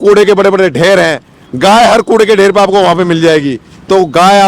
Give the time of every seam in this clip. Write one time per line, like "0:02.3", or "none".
none